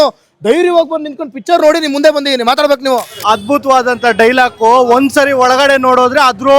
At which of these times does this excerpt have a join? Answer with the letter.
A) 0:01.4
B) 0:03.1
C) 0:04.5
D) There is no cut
B